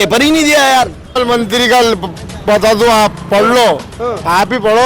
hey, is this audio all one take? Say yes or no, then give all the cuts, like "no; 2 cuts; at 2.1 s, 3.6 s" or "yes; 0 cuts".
no; 1 cut; at 1.2 s